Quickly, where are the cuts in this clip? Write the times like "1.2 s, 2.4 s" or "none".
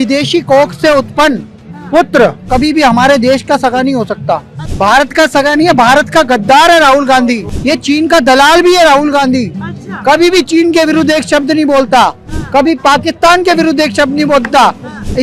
2.5 s, 4.6 s, 7.5 s